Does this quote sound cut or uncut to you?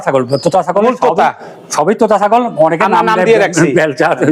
uncut